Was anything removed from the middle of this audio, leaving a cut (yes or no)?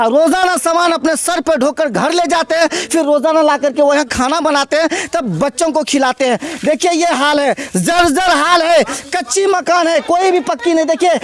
no